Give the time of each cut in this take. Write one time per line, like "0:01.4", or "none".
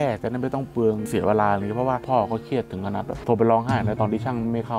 0:01.0
0:02.0

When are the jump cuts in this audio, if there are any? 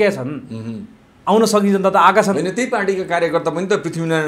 none

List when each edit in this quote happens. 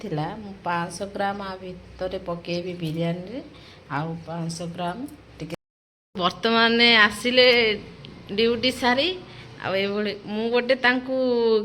0:05.7

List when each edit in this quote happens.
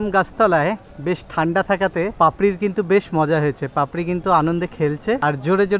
none

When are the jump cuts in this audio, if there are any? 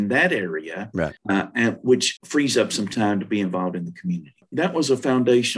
0:01.2
0:02.2
0:04.4

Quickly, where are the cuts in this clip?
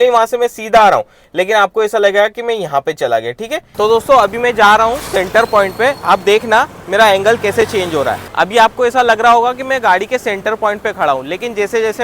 none

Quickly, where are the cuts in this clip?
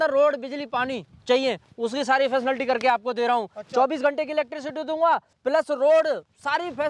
none

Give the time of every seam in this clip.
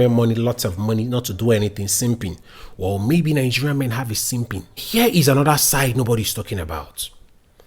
0:04.8

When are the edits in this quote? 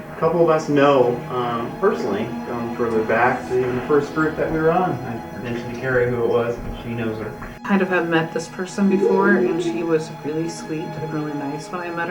0:07.6

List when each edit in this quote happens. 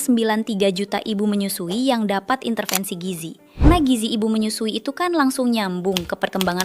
0:03.6

